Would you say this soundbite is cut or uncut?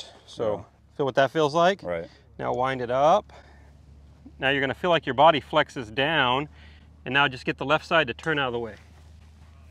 uncut